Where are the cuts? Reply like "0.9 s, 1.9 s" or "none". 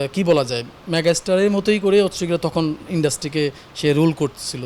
none

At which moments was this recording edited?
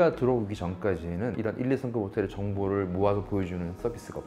1.4 s

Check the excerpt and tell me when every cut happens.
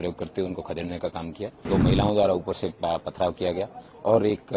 1.7 s

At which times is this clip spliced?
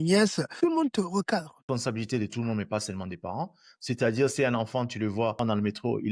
1.7 s, 5.3 s

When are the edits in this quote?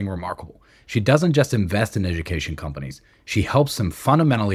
none

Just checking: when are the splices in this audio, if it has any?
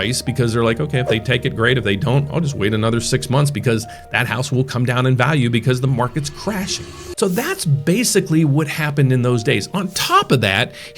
7.0 s

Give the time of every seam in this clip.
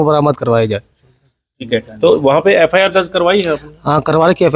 none

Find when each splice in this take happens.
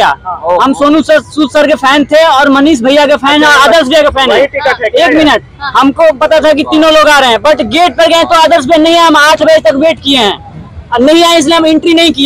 none

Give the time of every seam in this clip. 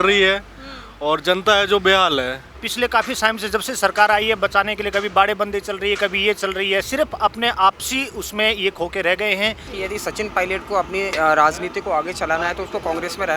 2.5 s, 9.7 s

